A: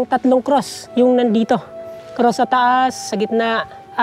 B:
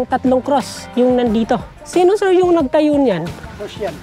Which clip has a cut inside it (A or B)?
B